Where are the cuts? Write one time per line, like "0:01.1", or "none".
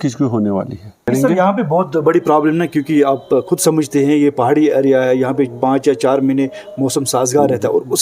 0:01.0